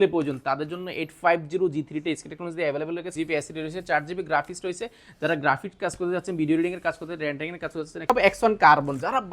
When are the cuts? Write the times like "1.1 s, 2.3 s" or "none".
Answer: 3.1 s, 8.1 s